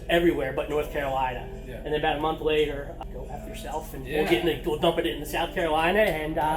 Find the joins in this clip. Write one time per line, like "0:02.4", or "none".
0:02.9